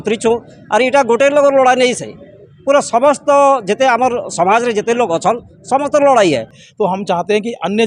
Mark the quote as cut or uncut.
cut